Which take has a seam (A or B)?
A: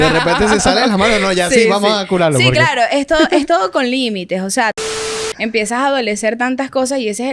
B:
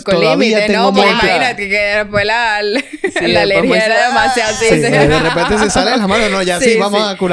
A